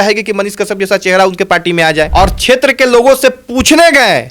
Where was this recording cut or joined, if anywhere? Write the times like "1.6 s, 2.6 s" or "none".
2.1 s